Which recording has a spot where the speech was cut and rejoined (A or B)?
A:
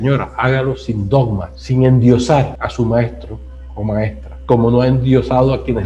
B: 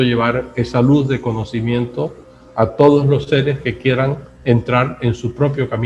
A